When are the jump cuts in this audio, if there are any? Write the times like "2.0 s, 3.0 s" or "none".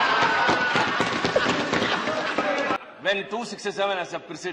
2.8 s